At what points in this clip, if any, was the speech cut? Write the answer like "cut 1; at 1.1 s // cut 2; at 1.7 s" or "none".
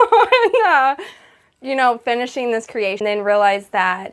cut 1; at 3.0 s